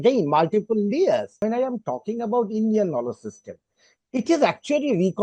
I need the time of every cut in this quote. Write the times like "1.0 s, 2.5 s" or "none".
1.4 s